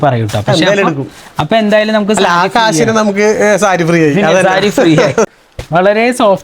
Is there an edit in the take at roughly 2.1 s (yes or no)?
no